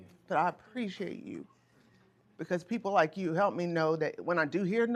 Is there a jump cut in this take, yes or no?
no